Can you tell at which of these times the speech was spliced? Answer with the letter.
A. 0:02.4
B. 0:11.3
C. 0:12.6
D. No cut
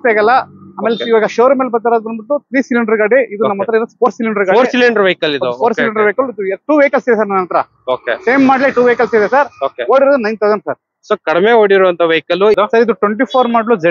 C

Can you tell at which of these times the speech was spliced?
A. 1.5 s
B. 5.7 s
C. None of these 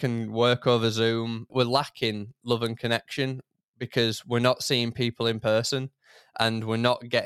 A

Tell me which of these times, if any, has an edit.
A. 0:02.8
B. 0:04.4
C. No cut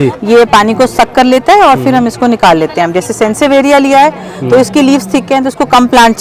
C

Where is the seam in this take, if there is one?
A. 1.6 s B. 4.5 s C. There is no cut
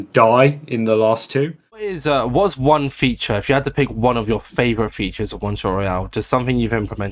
A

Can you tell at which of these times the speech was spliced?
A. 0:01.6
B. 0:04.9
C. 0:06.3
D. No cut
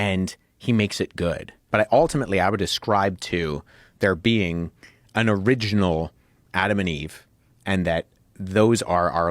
A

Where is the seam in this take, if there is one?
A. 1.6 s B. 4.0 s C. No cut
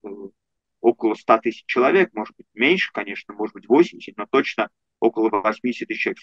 C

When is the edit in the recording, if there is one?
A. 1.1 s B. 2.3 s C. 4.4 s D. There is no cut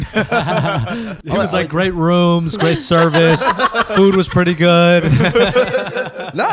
A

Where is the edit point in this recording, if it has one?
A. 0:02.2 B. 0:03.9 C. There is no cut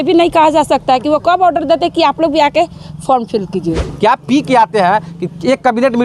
B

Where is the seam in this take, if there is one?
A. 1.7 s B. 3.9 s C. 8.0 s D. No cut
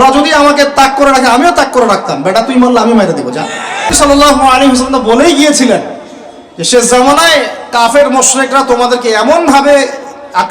B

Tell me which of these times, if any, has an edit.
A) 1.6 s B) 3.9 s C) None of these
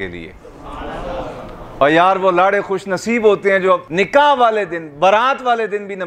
B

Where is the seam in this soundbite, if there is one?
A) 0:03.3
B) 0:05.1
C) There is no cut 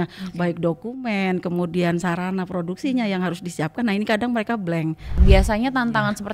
B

